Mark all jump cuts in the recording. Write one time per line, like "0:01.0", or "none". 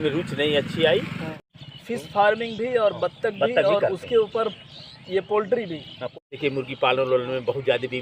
0:01.2
0:06.1

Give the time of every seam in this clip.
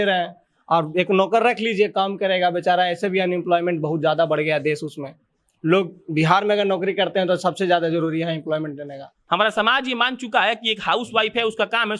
0:09.2

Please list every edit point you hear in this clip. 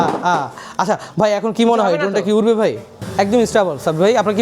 0:03.0

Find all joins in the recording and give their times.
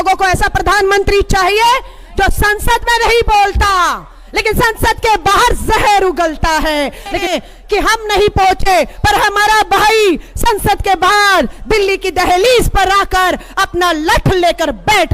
0:07.3

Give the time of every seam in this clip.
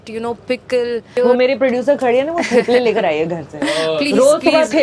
0:01.2

